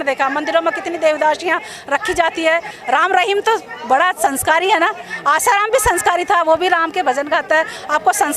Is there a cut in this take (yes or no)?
yes